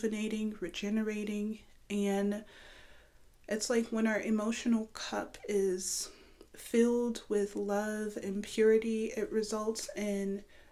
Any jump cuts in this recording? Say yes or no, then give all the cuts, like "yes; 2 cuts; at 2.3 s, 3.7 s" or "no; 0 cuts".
no; 0 cuts